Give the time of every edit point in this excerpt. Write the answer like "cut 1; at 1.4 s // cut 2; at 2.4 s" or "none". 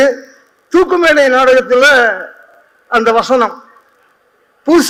none

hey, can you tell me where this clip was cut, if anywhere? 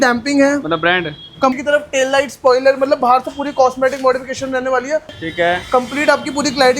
cut 1; at 1.6 s // cut 2; at 5.2 s

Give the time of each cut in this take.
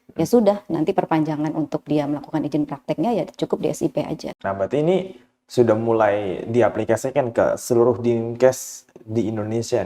cut 1; at 4.4 s

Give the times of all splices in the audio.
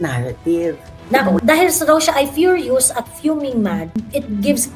cut 1; at 1.4 s

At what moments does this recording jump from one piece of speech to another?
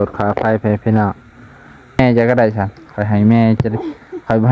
cut 1; at 2.0 s

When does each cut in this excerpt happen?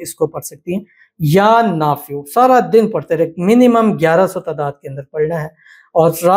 none

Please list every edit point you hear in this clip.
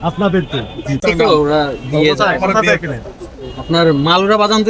cut 1; at 1.0 s

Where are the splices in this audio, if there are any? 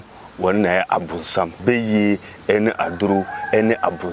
cut 1; at 1.6 s

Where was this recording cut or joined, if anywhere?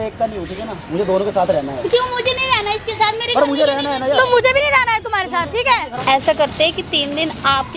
cut 1; at 5.9 s

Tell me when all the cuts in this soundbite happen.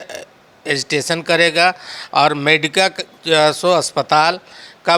none

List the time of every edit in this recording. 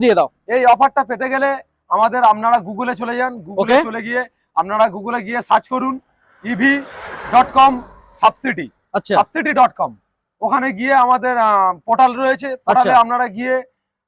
none

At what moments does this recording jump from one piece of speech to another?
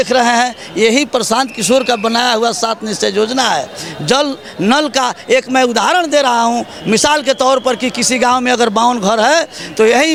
none

